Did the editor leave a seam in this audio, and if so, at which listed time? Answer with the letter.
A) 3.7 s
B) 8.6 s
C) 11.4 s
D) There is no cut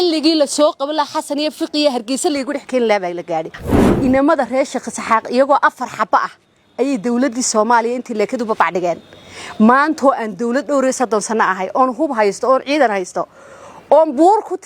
A